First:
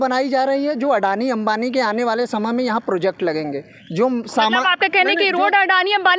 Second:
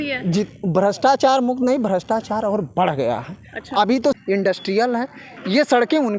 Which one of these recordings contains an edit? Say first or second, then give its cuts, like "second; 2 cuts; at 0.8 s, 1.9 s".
second; 1 cut; at 4.2 s